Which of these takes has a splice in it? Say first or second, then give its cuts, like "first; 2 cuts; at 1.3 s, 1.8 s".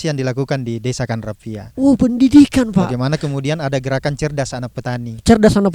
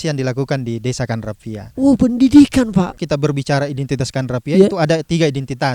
second; 1 cut; at 3.0 s